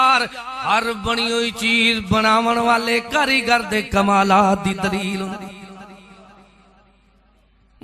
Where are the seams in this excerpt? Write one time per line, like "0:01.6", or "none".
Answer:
none